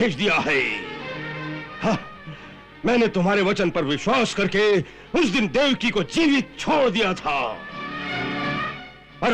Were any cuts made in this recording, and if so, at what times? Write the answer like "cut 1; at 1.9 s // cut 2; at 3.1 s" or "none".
none